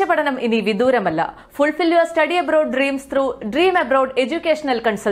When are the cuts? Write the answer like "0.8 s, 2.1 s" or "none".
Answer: none